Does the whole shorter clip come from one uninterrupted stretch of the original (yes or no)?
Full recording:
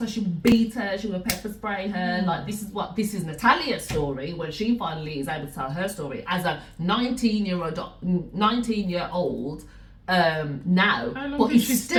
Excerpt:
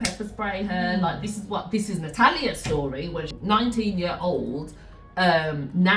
no